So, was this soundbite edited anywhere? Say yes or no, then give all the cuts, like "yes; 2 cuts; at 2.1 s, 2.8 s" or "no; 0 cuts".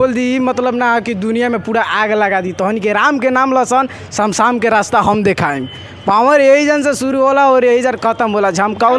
no; 0 cuts